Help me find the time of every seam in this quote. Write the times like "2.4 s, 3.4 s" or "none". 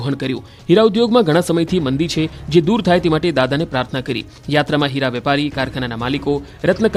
none